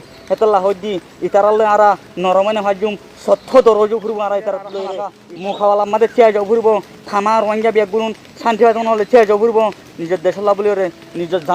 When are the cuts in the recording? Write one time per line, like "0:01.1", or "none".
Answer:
0:05.2